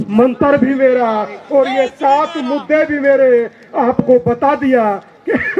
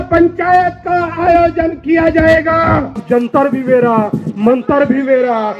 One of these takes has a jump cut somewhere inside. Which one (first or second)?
second